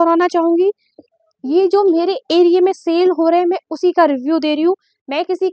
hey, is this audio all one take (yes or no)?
yes